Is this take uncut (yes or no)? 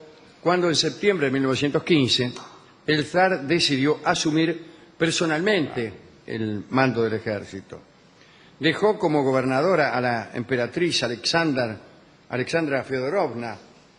no